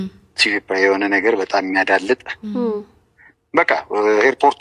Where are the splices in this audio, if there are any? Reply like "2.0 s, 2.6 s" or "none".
none